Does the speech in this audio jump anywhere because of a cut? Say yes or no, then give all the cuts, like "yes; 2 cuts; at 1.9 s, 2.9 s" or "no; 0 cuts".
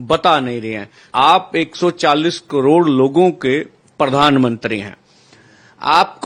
yes; 1 cut; at 1.0 s